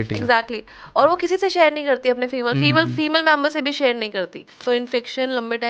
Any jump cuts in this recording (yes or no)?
yes